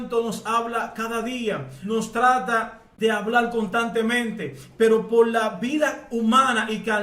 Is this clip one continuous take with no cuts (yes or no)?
no